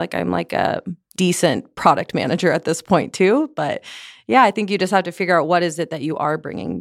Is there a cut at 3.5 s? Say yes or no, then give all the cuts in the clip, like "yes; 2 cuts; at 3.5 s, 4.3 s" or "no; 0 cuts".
no; 1 cut; at 1.0 s